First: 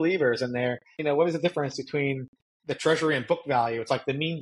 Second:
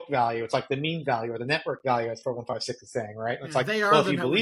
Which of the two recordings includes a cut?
first; 1 cut; at 1.0 s

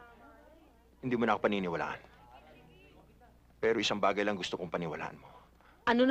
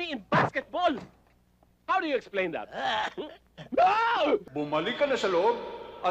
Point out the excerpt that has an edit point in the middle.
second; 1 cut; at 4.5 s

